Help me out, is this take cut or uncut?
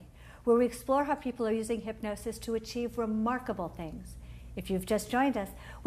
cut